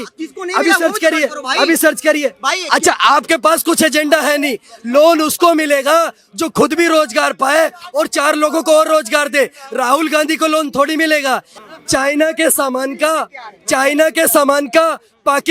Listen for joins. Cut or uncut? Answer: cut